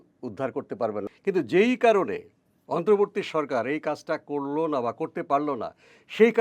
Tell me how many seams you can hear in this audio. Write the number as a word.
one